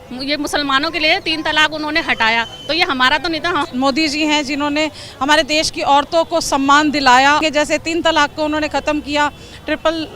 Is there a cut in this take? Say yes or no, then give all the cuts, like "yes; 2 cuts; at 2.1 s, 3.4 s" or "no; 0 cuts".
yes; 2 cuts; at 3.7 s, 7.4 s